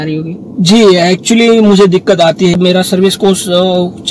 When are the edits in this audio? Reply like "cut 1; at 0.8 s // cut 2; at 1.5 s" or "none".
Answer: cut 1; at 2.6 s